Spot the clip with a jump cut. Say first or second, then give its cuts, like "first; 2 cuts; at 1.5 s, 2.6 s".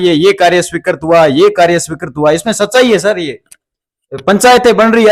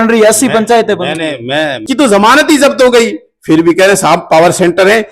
second; 1 cut; at 1.8 s